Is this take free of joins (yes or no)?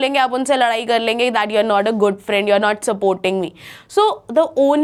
yes